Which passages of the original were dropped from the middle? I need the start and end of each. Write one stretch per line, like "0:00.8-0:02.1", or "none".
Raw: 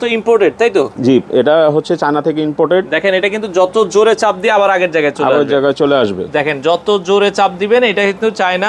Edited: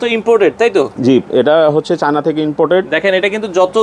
none